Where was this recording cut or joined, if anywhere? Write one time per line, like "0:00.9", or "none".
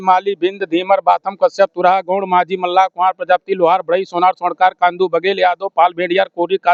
none